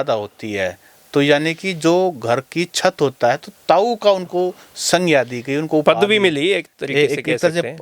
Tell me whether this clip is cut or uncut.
uncut